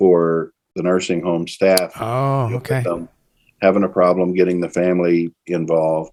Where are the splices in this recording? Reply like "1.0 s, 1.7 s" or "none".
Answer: none